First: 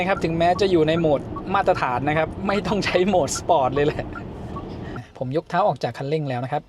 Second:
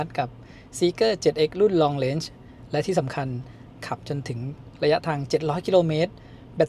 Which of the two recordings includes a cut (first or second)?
first